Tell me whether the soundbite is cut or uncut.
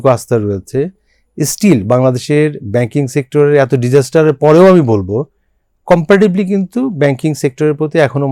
uncut